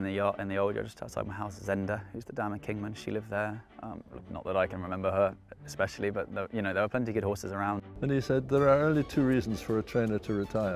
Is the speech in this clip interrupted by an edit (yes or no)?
yes